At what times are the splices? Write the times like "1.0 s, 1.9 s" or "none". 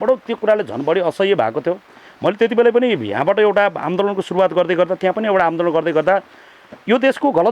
none